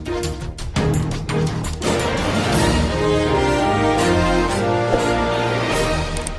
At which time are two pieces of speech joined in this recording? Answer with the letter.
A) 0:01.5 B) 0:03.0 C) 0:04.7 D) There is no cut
D